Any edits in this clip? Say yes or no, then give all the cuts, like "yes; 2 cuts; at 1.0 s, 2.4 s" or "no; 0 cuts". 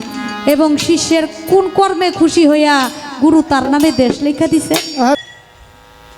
yes; 1 cut; at 5.2 s